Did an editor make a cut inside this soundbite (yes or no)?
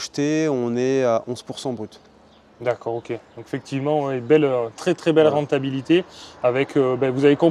no